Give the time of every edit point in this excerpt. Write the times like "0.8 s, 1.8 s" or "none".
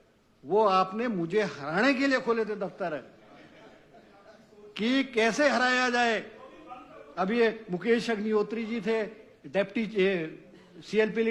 none